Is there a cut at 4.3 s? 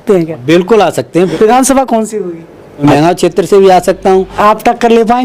yes; 3 cuts; at 1.3 s, 2.8 s, 4.3 s

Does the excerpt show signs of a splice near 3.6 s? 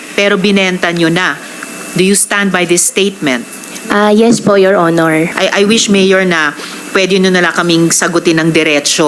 no; 1 cut; at 5.3 s

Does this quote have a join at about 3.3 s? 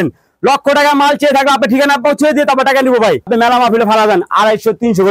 yes; 1 cut; at 3.3 s

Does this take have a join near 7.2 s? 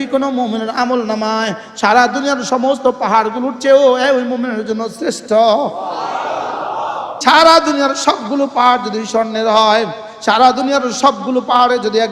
yes; 1 cut; at 7.2 s

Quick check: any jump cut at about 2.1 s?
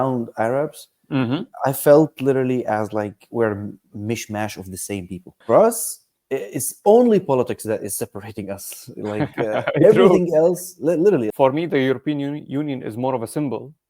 no; 2 cuts; at 5.4 s, 11.3 s

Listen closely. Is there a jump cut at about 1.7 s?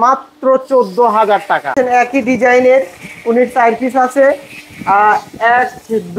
yes; 1 cut; at 1.7 s

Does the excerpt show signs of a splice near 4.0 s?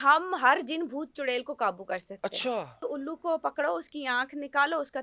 no; 1 cut; at 2.8 s

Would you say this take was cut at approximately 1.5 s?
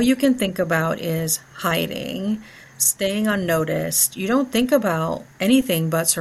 no; 1 cut; at 5.2 s

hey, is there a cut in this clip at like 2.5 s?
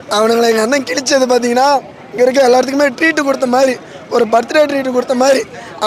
no; 0 cuts

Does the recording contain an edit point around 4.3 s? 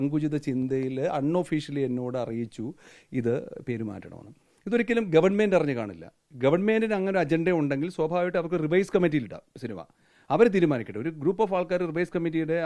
no; 0 cuts

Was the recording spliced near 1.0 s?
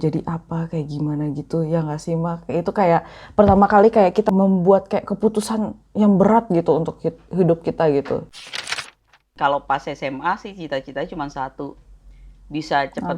no; 2 cuts; at 4.2 s, 8.8 s

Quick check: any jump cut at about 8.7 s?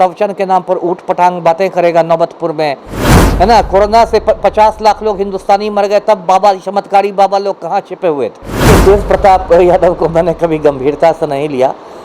yes; 2 cuts; at 3.2 s, 8.7 s

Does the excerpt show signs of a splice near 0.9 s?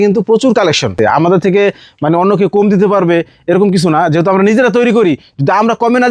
yes; 1 cut; at 0.9 s

